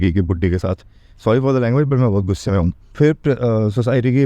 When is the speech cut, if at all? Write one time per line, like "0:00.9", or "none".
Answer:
0:02.8